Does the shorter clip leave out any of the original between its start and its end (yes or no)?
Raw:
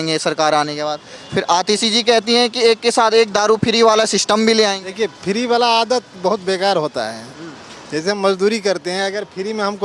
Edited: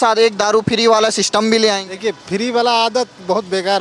no